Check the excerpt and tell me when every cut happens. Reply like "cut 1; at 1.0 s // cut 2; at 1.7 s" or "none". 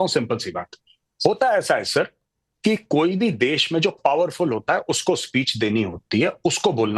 none